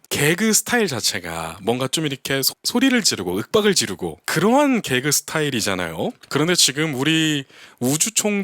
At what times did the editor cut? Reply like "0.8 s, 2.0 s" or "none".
4.2 s